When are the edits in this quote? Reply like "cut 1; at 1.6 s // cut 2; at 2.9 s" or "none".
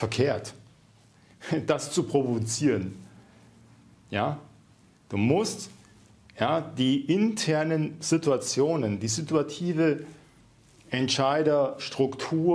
none